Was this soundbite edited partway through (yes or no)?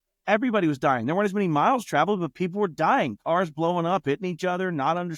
no